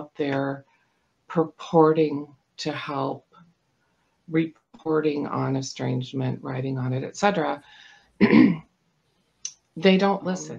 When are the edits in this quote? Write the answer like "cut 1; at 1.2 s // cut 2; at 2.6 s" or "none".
none

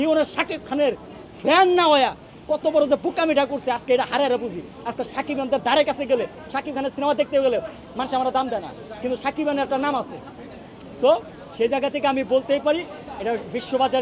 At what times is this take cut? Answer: none

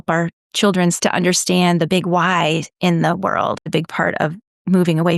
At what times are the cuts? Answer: cut 1; at 1.0 s // cut 2; at 3.6 s

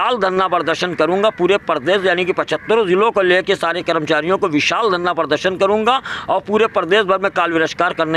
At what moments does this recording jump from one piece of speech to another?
none

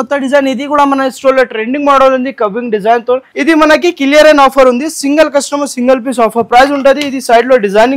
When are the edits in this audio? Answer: cut 1; at 3.3 s

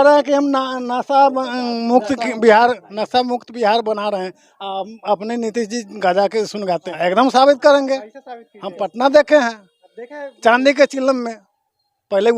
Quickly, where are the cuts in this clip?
cut 1; at 6.9 s

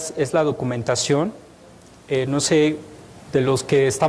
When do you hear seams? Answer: none

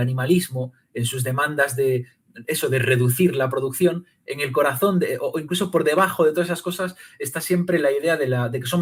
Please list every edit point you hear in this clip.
none

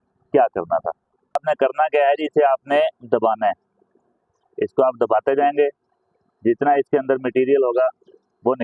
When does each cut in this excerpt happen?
cut 1; at 1.4 s

